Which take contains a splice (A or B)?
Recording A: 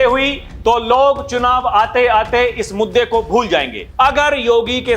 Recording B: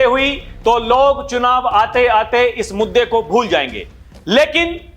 A